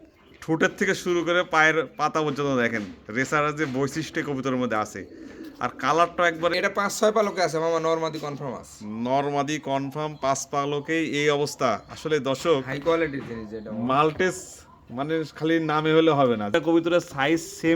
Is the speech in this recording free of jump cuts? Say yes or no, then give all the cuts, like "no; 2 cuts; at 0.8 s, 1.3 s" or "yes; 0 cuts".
no; 2 cuts; at 6.5 s, 16.5 s